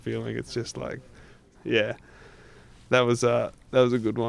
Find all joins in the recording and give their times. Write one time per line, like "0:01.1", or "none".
0:01.5